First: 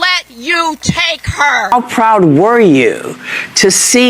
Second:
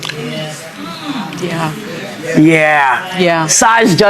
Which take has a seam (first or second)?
first